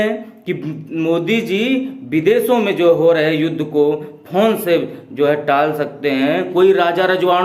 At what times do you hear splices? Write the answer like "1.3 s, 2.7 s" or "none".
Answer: 6.5 s